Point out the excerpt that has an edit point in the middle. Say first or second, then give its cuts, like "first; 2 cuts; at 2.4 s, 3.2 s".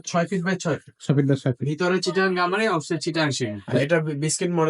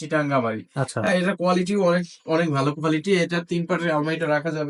first; 1 cut; at 3.6 s